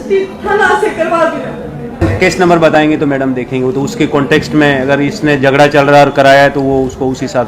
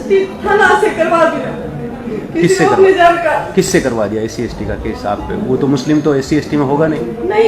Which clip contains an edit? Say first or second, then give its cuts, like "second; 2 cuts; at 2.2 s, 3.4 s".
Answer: first; 1 cut; at 2.0 s